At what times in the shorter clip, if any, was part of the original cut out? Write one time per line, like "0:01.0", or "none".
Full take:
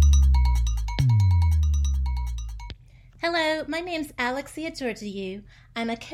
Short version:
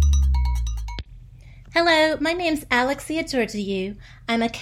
0:00.9